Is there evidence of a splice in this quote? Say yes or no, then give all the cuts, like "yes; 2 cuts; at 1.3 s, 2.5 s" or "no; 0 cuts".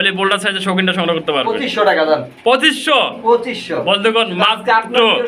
no; 0 cuts